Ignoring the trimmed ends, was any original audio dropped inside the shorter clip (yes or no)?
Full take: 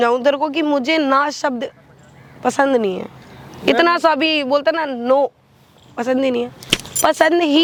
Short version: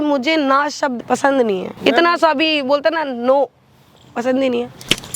yes